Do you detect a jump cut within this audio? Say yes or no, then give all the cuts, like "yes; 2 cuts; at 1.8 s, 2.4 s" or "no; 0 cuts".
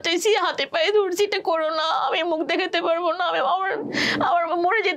no; 0 cuts